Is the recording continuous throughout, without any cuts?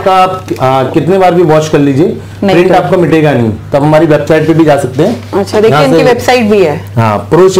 no; 1 cut; at 3.6 s

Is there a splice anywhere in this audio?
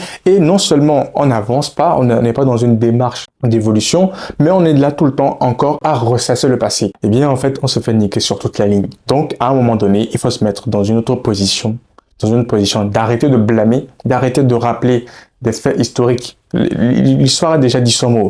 no; 0 cuts

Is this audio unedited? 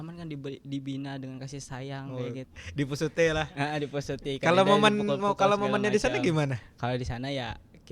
yes; 0 cuts

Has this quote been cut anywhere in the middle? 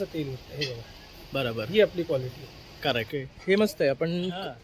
yes; 1 cut; at 3.1 s

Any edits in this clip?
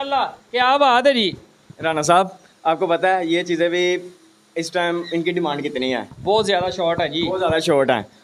no; 0 cuts

